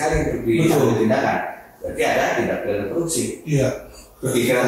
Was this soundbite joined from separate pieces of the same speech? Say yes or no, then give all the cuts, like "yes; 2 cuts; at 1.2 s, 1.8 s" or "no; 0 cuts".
no; 0 cuts